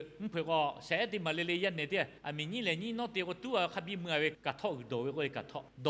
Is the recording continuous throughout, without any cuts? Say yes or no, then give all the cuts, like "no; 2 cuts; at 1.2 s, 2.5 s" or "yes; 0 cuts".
no; 2 cuts; at 2.2 s, 4.4 s